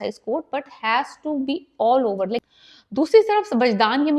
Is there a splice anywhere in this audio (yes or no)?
yes